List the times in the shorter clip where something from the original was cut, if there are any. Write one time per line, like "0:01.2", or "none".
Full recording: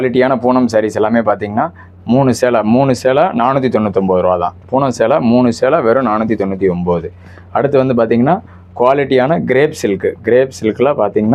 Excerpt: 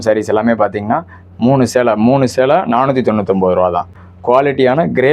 0:04.0